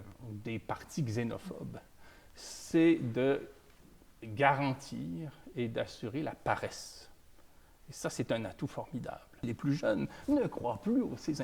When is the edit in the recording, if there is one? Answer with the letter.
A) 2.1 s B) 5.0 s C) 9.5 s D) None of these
C